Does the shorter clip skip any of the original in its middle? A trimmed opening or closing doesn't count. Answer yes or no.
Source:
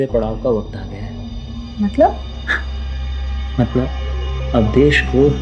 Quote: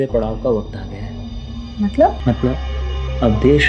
yes